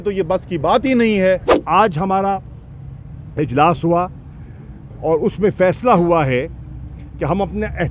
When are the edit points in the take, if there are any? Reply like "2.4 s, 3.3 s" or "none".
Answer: 1.5 s